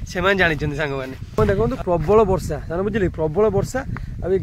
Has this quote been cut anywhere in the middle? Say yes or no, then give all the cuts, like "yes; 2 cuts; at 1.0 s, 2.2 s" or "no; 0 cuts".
yes; 1 cut; at 1.4 s